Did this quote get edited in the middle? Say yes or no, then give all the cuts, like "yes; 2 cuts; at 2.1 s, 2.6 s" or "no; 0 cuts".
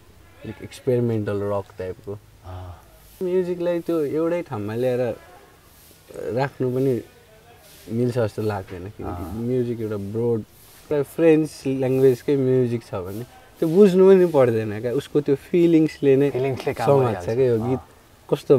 yes; 2 cuts; at 3.2 s, 10.9 s